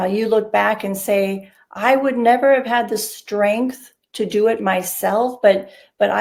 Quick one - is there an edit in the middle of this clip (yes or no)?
no